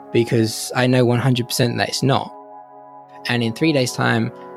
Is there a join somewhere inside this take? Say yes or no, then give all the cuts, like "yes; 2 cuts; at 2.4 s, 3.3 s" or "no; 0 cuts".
yes; 1 cut; at 2.8 s